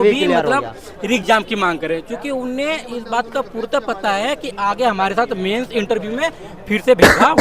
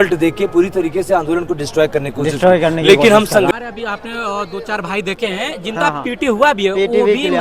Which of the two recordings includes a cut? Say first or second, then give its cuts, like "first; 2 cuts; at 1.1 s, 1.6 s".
second; 1 cut; at 3.5 s